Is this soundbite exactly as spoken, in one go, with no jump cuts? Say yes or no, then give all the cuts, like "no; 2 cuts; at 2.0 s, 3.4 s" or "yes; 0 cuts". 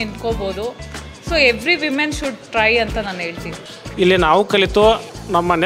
no; 1 cut; at 3.5 s